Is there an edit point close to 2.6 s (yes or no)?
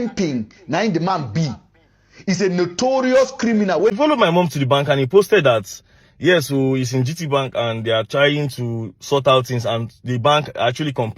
no